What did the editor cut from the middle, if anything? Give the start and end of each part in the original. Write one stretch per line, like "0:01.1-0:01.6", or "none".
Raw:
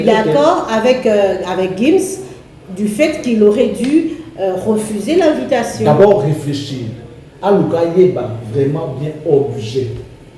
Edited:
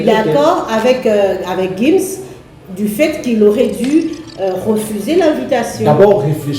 none